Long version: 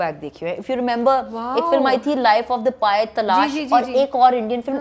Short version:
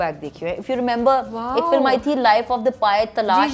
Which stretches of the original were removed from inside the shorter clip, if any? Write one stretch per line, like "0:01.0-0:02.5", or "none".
none